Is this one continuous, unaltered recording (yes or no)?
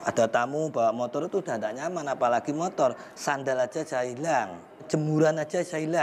no